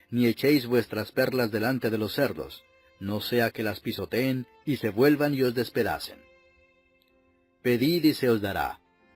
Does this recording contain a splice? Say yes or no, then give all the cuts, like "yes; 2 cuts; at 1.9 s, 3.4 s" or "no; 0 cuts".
no; 0 cuts